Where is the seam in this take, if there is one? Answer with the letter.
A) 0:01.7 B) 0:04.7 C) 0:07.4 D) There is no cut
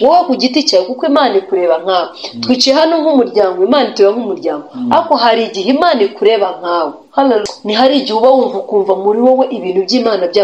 C